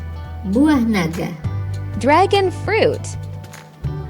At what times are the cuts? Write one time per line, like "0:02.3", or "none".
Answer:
0:03.2